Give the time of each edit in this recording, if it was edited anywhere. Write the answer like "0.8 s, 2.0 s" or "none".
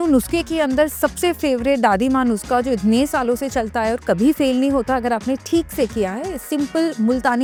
none